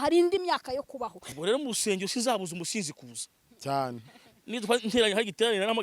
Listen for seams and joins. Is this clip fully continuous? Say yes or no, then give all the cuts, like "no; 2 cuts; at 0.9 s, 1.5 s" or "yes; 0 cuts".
no; 1 cut; at 1.3 s